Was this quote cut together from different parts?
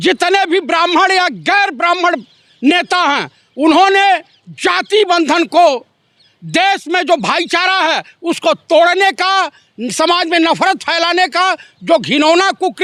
no; 0 cuts

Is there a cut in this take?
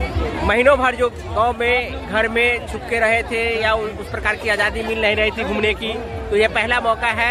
no; 0 cuts

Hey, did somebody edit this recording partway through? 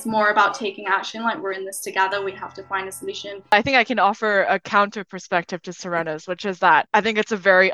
yes; 2 cuts; at 3.5 s, 6.9 s

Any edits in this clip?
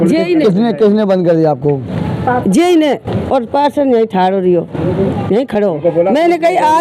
no; 0 cuts

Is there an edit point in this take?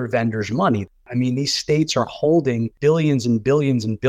yes; 2 cuts; at 1.0 s, 2.7 s

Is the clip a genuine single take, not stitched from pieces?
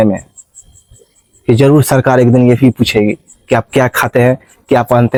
yes; 0 cuts

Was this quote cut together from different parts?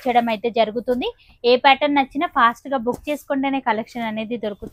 no; 0 cuts

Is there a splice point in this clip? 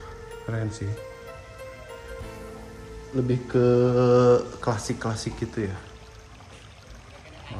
no; 0 cuts

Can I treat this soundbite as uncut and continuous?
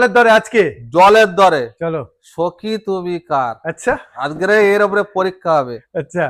yes; 0 cuts

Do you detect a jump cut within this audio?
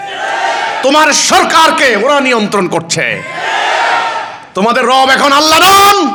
no; 0 cuts

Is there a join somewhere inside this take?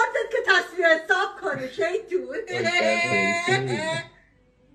no; 0 cuts

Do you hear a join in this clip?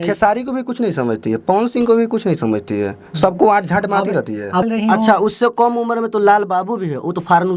yes; 1 cut; at 4.6 s

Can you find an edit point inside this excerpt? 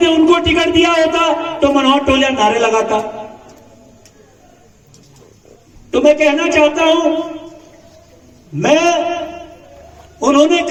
no; 0 cuts

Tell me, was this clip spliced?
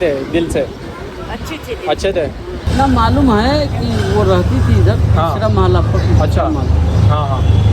yes; 1 cut; at 2.6 s

